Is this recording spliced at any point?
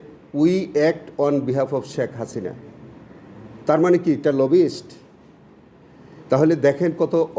no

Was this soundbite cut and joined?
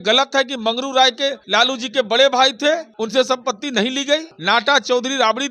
yes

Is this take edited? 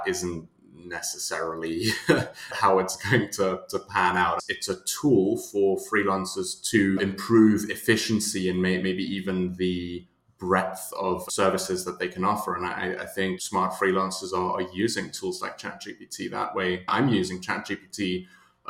yes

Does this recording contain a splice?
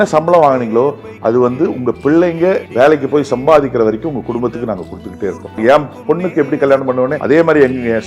yes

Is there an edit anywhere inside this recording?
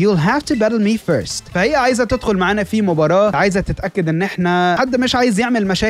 yes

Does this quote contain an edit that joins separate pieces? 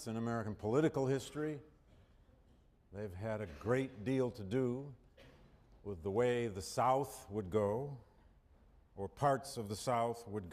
yes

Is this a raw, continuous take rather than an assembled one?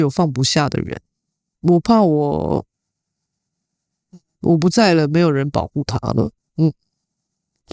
no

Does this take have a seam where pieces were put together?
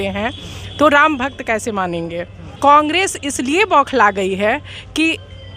yes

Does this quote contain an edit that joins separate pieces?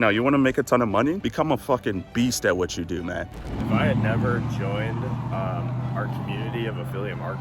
yes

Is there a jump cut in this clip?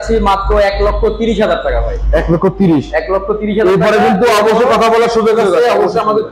no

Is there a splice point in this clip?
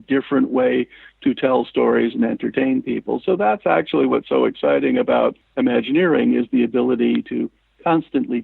yes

